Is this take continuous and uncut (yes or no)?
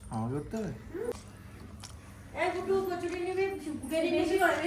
no